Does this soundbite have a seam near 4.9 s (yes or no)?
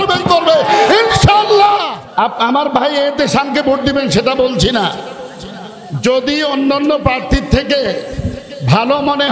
no